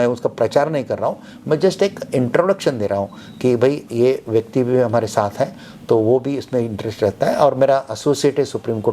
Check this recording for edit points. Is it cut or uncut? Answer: uncut